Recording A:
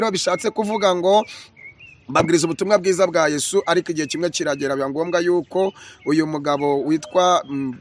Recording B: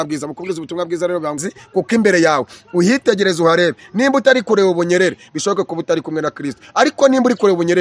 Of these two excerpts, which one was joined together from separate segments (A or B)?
B